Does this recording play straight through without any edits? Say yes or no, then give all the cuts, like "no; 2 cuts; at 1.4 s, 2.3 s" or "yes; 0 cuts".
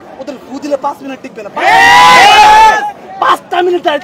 yes; 0 cuts